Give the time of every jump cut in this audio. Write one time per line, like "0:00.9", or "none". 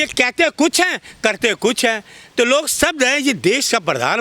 none